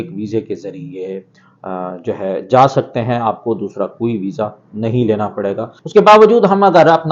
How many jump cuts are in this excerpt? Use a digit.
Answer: 1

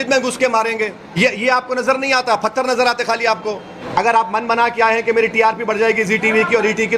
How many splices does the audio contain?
2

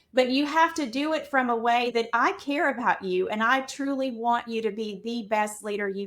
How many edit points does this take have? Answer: 1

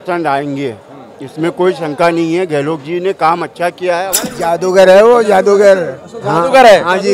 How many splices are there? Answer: 1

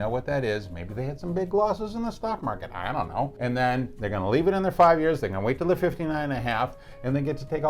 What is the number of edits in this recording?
1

